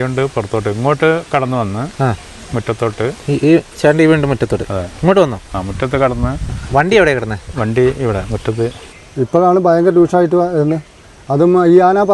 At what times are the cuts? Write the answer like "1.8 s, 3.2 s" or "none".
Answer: 9.0 s